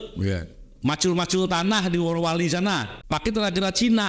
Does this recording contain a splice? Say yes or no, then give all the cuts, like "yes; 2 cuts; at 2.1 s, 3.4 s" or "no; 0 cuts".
yes; 1 cut; at 2.9 s